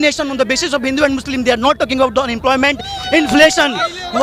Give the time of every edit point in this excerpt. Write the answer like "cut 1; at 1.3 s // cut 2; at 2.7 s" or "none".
none